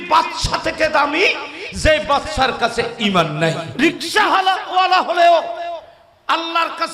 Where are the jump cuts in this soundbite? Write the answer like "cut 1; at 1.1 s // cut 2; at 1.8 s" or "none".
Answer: cut 1; at 3.7 s